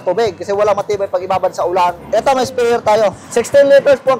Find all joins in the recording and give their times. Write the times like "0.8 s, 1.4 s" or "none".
2.0 s, 3.2 s